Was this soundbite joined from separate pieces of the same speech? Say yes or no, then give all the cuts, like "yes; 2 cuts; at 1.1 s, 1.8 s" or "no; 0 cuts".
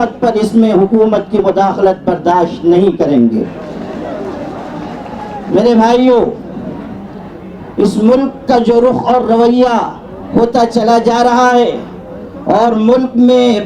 no; 0 cuts